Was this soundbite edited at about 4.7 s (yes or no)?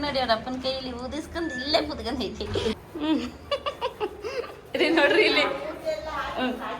no